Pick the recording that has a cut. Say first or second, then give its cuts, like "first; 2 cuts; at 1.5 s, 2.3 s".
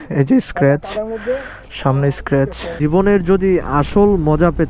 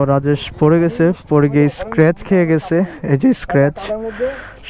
first; 1 cut; at 2.8 s